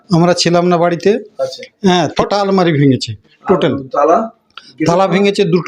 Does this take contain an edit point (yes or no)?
yes